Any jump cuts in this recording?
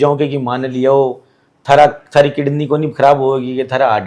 no; 0 cuts

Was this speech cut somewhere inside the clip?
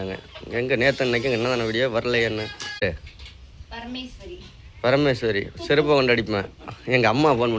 yes; 1 cut; at 2.8 s

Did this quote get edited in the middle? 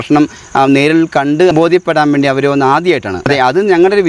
yes; 2 cuts; at 1.5 s, 3.3 s

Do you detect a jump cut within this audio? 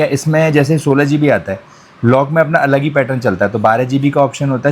no; 0 cuts

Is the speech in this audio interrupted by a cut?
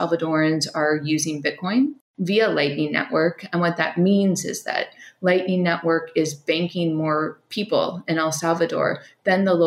yes; 1 cut; at 2.1 s

